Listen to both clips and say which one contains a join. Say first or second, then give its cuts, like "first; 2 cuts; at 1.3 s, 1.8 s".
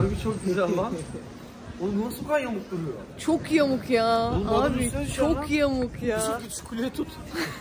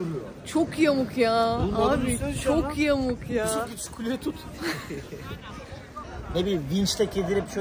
second; 1 cut; at 6.1 s